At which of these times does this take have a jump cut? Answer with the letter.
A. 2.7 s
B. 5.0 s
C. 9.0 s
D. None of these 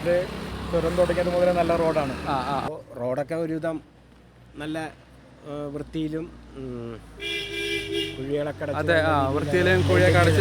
A